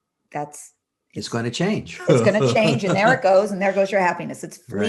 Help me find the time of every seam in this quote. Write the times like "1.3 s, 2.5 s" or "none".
none